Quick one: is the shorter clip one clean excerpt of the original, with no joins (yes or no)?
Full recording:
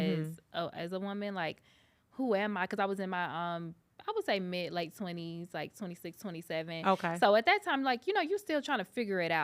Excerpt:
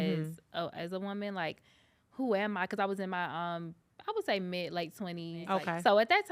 no